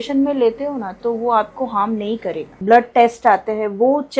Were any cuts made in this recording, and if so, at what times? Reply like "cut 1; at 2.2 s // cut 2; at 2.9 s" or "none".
cut 1; at 2.6 s